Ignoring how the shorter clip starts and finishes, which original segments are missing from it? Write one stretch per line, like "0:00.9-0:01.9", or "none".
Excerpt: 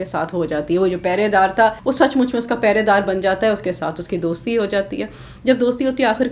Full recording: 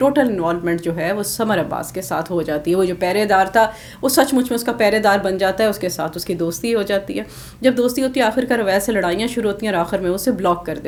0:03.8-0:04.0